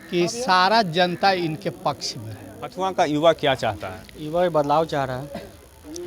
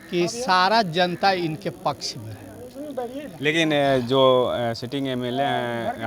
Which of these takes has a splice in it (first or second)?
first